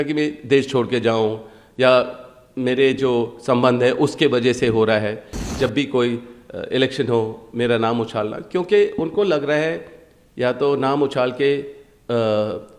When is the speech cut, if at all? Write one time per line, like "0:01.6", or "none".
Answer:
0:05.4